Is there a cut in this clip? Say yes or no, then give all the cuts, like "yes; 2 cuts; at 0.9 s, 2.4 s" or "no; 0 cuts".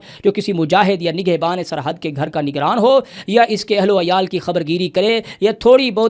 no; 0 cuts